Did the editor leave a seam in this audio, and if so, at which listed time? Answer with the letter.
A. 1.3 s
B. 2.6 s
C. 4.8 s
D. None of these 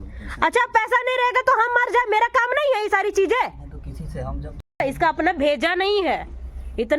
C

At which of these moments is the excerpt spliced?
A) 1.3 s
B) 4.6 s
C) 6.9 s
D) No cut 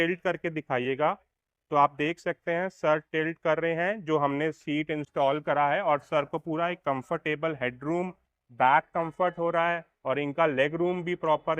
D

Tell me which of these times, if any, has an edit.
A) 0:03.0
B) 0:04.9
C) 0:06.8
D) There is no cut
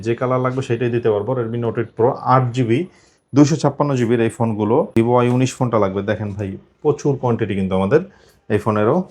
B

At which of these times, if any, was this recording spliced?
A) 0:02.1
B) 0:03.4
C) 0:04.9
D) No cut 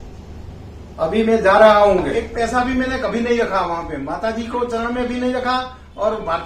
A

